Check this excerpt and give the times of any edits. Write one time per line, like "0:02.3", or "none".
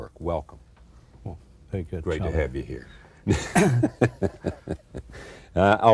0:02.2